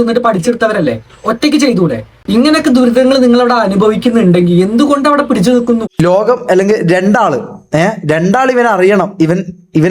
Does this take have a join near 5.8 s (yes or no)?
yes